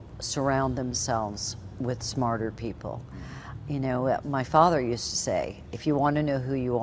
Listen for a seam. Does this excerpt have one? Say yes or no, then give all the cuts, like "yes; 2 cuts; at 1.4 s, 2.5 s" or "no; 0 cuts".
no; 0 cuts